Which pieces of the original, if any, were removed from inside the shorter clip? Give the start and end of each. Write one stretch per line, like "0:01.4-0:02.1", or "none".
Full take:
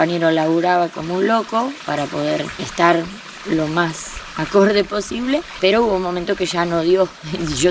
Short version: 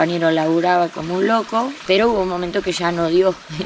0:01.8-0:05.5

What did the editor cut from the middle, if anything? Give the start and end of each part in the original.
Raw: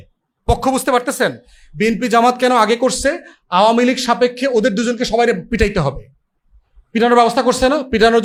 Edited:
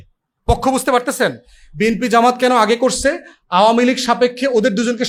none

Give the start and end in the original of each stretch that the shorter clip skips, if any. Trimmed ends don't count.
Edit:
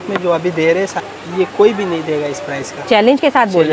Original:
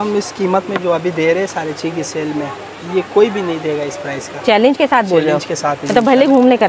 0:01.6-0:02.6

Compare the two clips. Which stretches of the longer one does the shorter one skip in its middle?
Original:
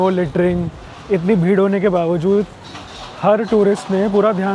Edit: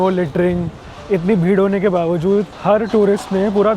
0:02.5-0:03.1

